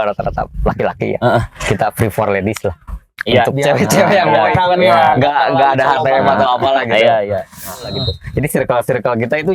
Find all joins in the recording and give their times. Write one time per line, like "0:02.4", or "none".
0:08.0